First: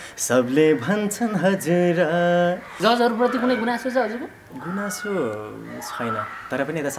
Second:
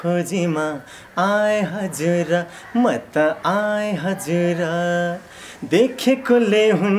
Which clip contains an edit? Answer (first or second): first